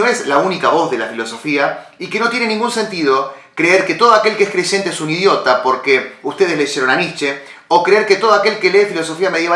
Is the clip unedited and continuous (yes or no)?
yes